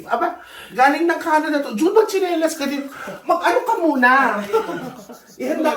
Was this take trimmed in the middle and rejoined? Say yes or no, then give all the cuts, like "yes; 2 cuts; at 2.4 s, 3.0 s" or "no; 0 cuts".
no; 0 cuts